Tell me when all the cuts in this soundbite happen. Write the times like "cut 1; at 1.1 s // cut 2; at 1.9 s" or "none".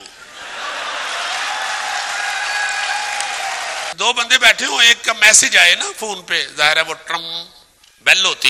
cut 1; at 3.9 s